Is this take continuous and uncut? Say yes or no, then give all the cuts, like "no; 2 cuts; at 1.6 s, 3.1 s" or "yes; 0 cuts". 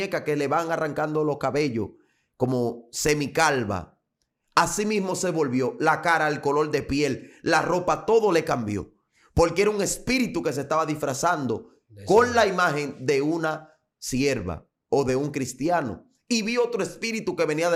yes; 0 cuts